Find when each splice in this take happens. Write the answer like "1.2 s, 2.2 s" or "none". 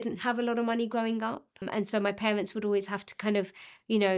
1.7 s